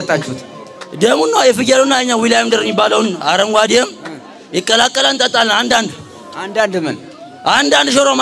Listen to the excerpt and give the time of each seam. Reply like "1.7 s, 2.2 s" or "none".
none